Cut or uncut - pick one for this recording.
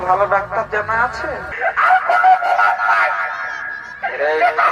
cut